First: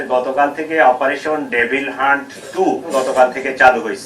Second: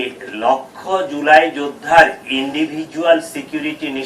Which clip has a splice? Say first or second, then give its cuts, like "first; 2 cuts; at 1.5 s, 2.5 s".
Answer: first; 1 cut; at 2.8 s